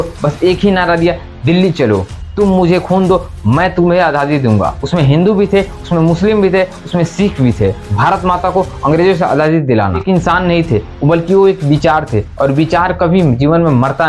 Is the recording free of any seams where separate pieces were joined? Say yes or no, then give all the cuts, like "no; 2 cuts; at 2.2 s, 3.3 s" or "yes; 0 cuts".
no; 4 cuts; at 2.2 s, 4.8 s, 7.9 s, 10.0 s